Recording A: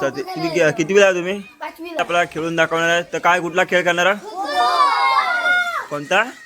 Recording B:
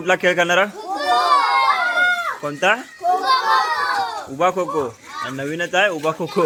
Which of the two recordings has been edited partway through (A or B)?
A